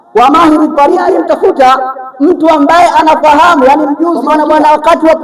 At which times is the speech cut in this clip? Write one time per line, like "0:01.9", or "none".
0:01.0
0:04.2

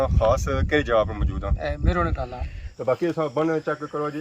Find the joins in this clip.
0:02.7

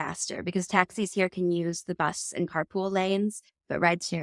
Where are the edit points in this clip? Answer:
none

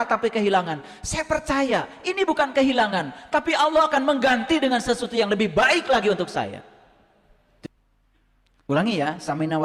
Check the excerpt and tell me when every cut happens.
0:07.7

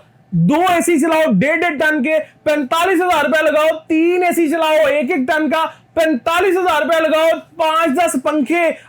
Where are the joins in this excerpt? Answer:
none

